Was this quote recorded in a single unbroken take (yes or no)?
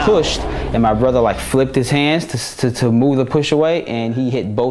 yes